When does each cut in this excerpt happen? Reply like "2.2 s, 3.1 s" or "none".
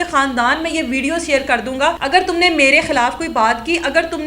2.0 s